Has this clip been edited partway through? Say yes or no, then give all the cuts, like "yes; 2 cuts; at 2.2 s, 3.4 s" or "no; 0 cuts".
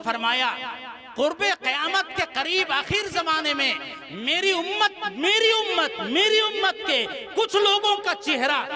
no; 0 cuts